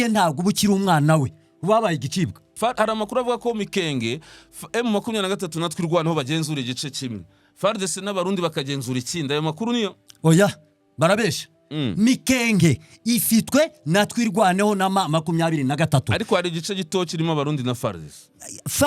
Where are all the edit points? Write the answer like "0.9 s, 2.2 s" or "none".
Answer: 2.5 s